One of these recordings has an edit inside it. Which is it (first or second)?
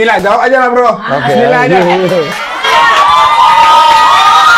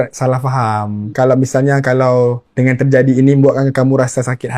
second